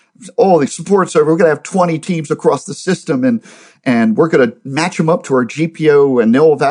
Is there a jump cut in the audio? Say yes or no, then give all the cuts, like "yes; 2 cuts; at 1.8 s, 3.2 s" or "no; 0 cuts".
no; 0 cuts